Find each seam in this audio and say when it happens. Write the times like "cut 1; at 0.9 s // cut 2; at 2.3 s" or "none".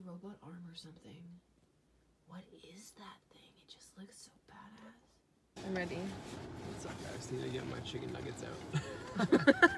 cut 1; at 5.6 s